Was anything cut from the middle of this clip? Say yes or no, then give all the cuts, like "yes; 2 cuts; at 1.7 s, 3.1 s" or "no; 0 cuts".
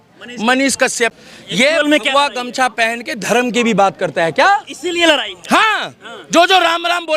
yes; 1 cut; at 1.1 s